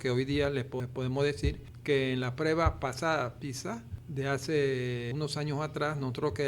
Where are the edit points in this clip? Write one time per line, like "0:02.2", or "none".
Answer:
0:00.9
0:01.7
0:04.0
0:05.1